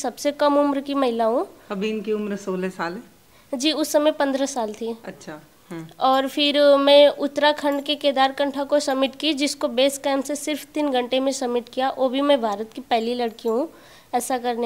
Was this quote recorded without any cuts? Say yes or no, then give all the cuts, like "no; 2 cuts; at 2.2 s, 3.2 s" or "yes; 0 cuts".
yes; 0 cuts